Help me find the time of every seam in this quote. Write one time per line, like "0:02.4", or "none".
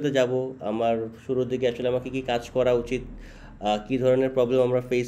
none